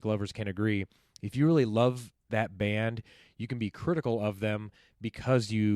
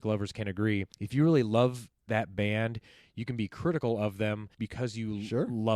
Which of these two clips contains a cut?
second; 2 cuts; at 1.0 s, 4.6 s

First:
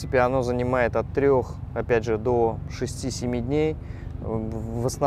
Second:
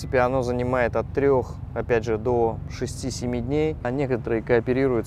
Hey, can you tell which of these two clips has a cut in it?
second; 1 cut; at 3.9 s

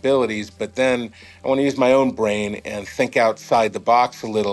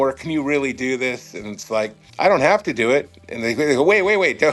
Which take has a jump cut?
second; 1 cut; at 2.0 s

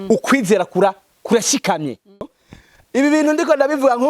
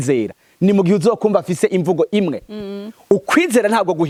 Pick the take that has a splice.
first; 1 cut; at 2.1 s

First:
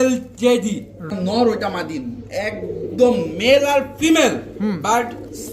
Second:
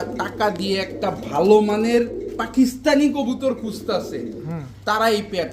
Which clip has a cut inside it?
first; 1 cut; at 1.0 s

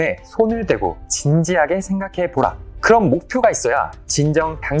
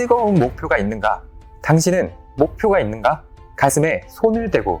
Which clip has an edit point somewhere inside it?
first; 1 cut; at 2.7 s

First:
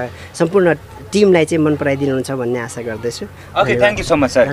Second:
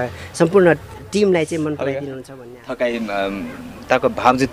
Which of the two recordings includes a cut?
second; 1 cut; at 2.2 s

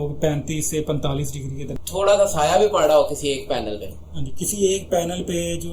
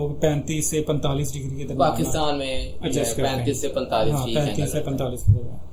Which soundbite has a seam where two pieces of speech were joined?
first; 1 cut; at 1.7 s

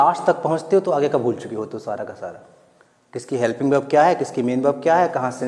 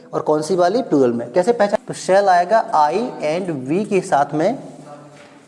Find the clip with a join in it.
second; 1 cut; at 1.7 s

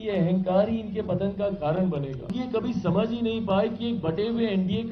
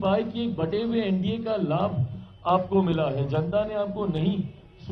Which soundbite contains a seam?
first; 1 cut; at 2.3 s

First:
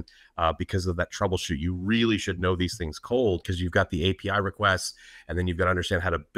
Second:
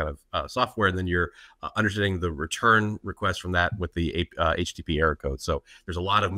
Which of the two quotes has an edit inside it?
first; 1 cut; at 3.5 s

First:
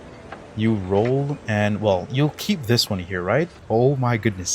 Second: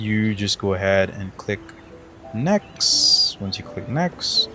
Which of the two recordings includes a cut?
first; 1 cut; at 3.6 s

